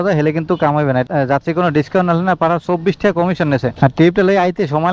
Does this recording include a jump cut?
no; 0 cuts

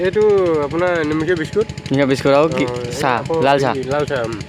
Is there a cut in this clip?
no; 0 cuts

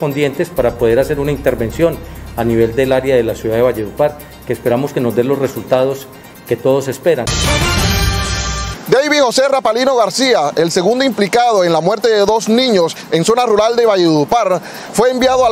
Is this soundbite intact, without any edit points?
no; 2 cuts; at 7.3 s, 8.7 s

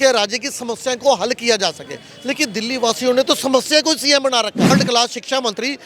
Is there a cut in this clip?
yes; 1 cut; at 4.7 s

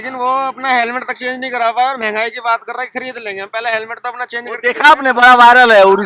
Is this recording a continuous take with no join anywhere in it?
yes; 0 cuts

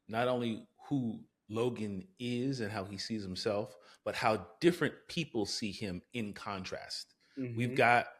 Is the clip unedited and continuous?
yes; 0 cuts

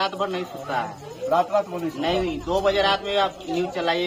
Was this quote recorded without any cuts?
yes; 0 cuts

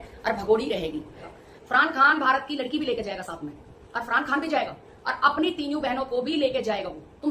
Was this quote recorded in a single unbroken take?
no; 1 cut; at 1.3 s

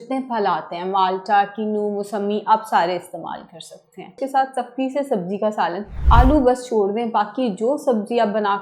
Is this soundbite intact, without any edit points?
no; 2 cuts; at 4.2 s, 6.0 s

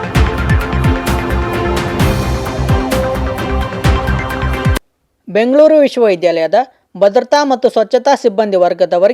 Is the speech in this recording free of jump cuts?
no; 1 cut; at 4.9 s

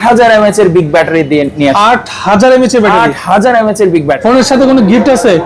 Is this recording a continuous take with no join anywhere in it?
no; 1 cut; at 4.1 s

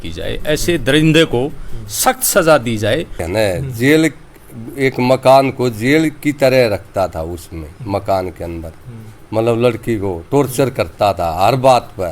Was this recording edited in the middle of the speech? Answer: yes; 1 cut; at 3.2 s

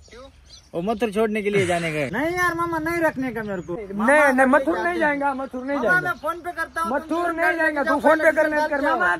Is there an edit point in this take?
yes; 2 cuts; at 2.1 s, 3.8 s

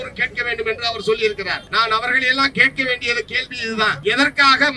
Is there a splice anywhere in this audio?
yes; 2 cuts; at 1.6 s, 4.0 s

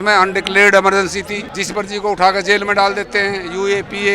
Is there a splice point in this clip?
yes; 1 cut; at 1.4 s

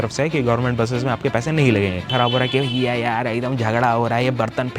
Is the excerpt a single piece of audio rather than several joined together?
no; 1 cut; at 2.1 s

